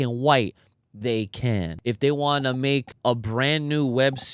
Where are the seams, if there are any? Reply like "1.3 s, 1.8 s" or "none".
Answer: 1.7 s, 2.9 s